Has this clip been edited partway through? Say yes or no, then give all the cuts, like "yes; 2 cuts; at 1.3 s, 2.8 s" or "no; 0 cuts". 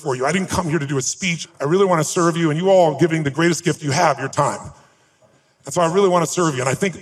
yes; 2 cuts; at 1.4 s, 5.2 s